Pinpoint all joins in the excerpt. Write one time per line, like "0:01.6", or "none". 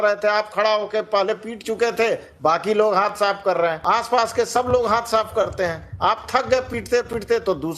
0:03.8